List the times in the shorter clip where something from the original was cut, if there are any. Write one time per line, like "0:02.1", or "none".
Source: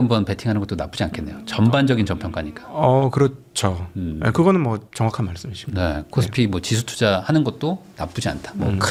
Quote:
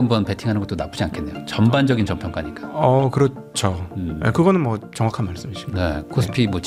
none

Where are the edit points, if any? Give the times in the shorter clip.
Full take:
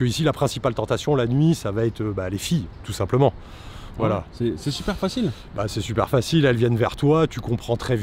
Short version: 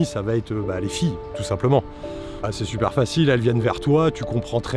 0:02.3

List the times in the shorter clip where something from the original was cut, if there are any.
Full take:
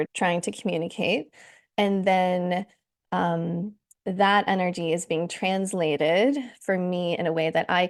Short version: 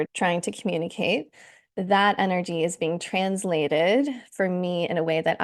0:01.5

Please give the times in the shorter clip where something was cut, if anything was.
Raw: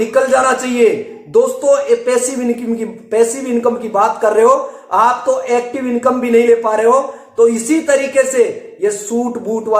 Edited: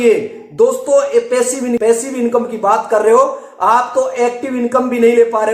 0:01.8

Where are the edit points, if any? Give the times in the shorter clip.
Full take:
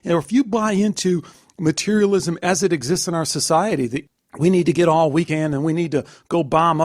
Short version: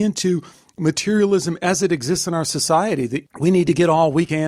0:03.2

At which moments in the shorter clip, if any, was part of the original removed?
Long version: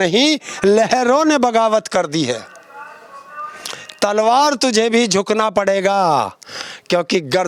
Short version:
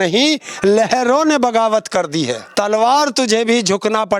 0:02.4

